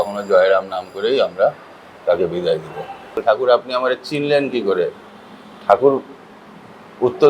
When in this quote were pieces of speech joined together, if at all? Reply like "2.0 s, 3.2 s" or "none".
3.2 s